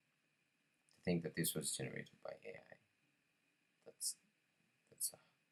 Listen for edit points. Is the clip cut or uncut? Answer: uncut